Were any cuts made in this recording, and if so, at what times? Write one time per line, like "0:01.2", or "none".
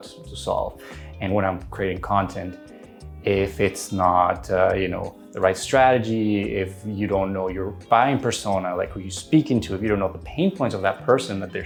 none